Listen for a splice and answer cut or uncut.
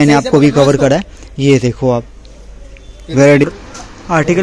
cut